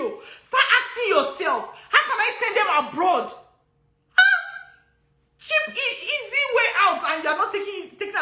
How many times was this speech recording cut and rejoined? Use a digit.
0